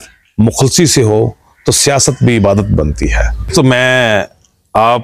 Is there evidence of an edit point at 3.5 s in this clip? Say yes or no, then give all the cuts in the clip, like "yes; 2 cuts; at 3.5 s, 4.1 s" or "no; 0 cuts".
yes; 1 cut; at 3.5 s